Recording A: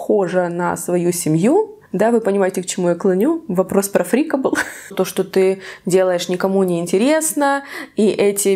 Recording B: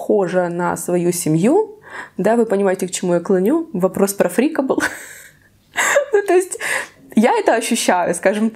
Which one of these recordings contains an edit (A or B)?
A